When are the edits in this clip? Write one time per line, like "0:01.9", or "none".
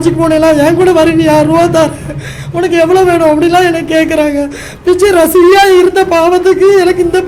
none